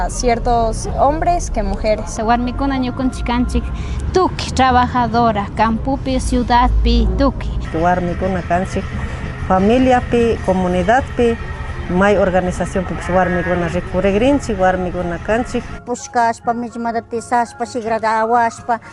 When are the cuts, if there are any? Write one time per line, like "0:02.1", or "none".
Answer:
none